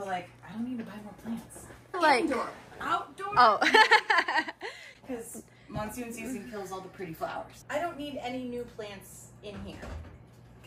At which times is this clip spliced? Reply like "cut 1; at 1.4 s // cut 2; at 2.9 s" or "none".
none